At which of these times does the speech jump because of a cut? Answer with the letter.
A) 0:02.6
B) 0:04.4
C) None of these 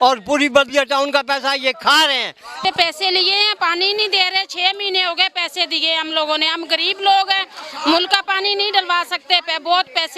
A